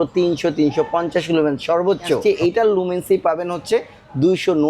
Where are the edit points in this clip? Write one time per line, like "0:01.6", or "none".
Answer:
0:02.2

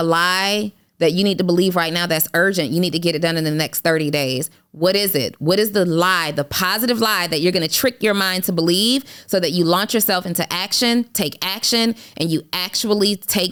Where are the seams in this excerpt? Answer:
none

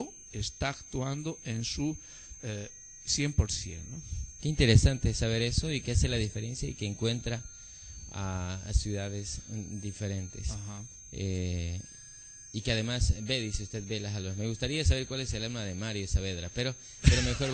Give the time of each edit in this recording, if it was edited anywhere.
none

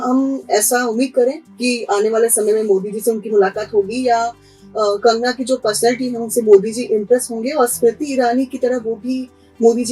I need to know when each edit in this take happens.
none

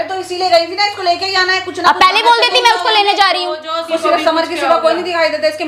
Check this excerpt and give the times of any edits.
0:03.9

